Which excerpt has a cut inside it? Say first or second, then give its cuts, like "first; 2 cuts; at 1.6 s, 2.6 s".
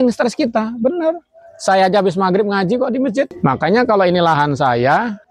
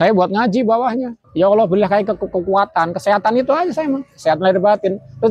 second; 1 cut; at 1.1 s